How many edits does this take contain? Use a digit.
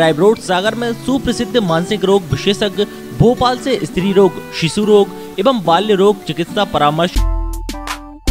1